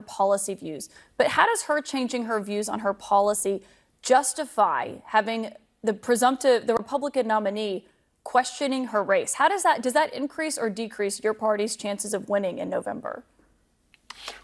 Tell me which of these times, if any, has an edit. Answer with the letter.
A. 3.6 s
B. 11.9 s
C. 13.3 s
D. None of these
C